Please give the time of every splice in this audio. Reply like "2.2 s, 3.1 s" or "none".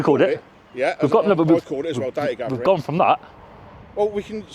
none